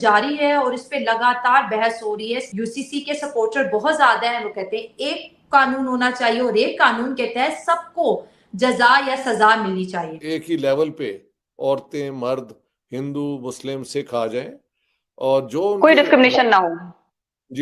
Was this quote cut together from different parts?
yes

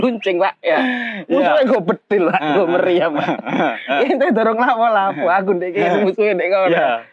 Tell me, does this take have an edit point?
no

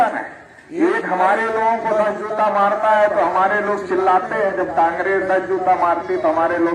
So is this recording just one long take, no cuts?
yes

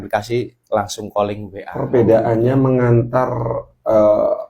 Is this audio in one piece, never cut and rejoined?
no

